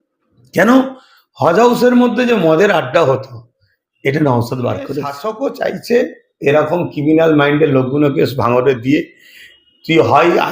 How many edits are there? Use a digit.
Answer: 1